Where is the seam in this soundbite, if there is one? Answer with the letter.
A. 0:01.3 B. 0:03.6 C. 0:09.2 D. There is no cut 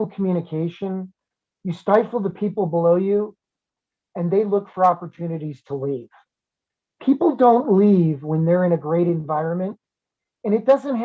A